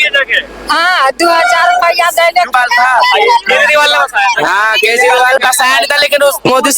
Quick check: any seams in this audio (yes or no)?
yes